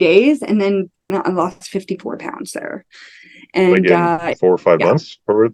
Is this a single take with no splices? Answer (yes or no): no